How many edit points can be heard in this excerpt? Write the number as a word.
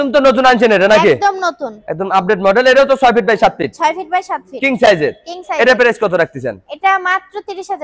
zero